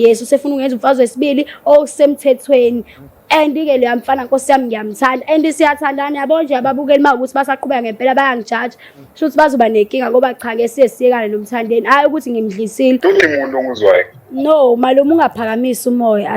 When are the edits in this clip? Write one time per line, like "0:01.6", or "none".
0:13.0